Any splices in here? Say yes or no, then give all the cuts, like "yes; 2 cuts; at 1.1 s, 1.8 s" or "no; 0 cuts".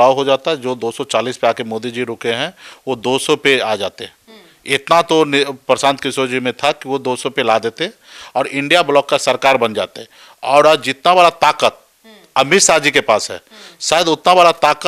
no; 0 cuts